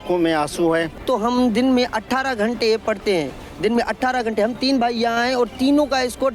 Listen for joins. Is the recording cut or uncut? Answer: cut